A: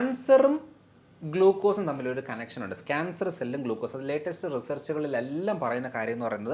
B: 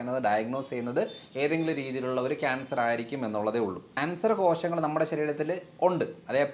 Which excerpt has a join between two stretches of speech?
B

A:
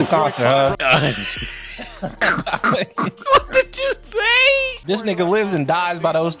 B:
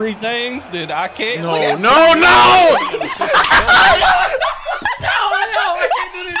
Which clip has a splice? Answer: A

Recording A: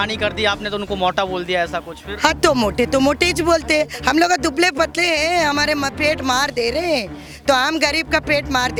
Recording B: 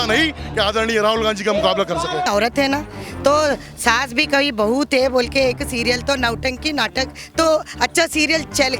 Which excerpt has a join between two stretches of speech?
B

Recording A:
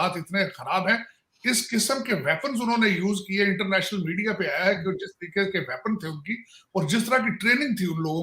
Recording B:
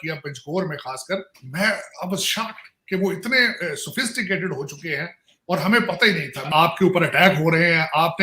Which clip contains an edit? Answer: B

